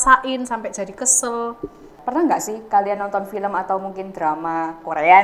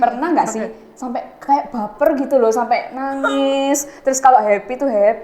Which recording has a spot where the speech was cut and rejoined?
first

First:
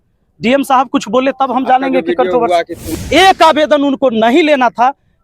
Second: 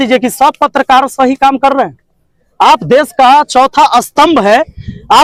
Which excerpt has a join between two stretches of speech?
first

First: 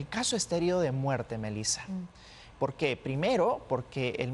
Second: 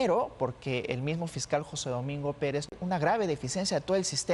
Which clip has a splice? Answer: second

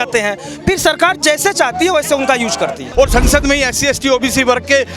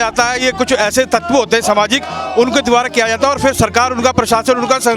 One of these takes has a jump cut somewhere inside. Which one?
first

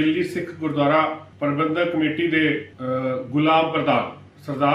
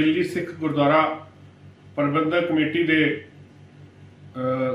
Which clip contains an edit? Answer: first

